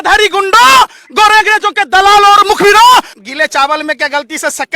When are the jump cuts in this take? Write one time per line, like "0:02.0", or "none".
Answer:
0:03.2

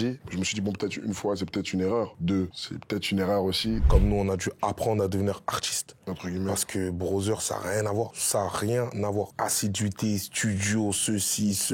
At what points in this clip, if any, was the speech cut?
0:03.8

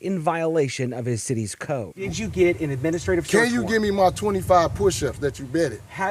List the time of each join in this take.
0:01.9

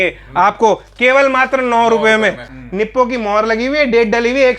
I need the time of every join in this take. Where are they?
0:02.6

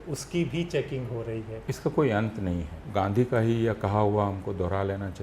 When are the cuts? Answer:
0:01.6
0:02.7

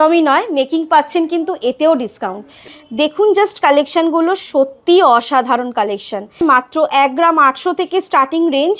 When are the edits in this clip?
0:02.6
0:06.4

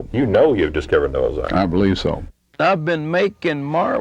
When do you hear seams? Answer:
0:02.4

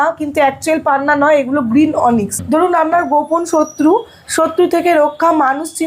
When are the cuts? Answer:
0:02.4

